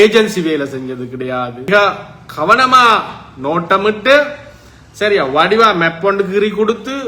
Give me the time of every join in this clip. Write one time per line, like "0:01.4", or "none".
0:01.7